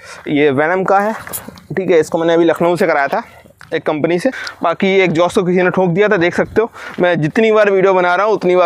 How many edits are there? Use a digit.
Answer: 1